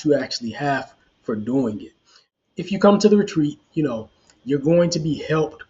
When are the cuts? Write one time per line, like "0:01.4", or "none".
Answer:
0:02.3